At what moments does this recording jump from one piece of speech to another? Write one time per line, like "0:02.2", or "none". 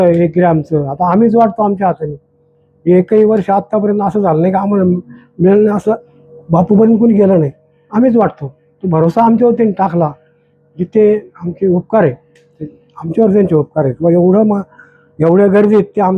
0:06.1